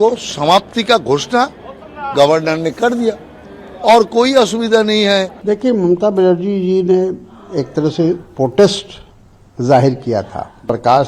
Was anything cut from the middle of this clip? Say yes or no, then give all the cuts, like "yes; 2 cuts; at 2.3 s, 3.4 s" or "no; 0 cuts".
no; 0 cuts